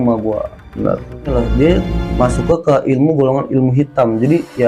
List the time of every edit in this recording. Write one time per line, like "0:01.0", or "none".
0:01.3